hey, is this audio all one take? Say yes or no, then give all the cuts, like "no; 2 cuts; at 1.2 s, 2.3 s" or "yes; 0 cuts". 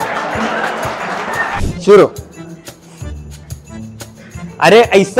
no; 1 cut; at 1.7 s